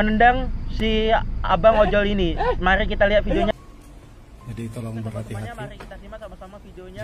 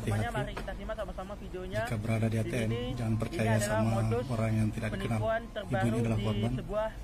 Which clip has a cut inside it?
first; 1 cut; at 3.5 s

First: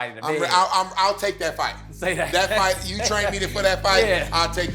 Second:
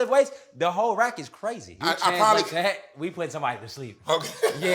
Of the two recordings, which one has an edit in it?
second; 1 cut; at 1.8 s

